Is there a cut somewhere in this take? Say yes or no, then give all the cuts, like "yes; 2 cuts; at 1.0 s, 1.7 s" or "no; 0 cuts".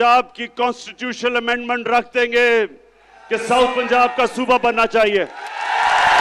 no; 0 cuts